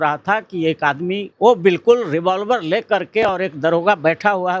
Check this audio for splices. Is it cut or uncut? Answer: cut